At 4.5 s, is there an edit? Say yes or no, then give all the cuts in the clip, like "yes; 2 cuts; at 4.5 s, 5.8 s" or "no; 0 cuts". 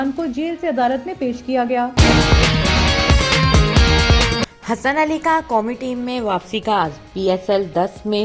yes; 2 cuts; at 1.9 s, 4.5 s